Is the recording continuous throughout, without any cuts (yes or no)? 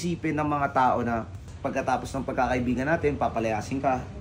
no